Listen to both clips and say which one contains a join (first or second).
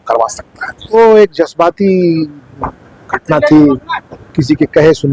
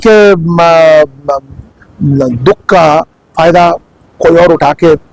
first